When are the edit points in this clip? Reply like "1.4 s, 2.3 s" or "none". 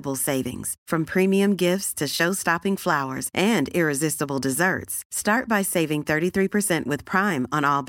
none